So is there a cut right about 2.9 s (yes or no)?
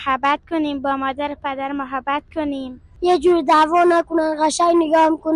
yes